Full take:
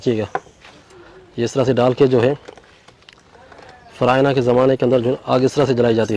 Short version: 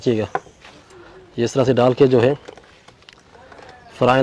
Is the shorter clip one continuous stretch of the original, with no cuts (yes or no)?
yes